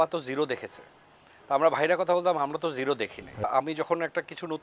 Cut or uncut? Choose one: cut